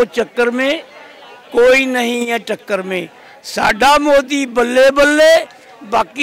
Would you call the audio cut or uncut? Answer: uncut